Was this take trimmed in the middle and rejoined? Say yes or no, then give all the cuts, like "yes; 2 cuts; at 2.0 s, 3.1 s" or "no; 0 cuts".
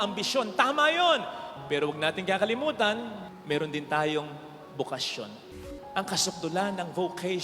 yes; 1 cut; at 5.6 s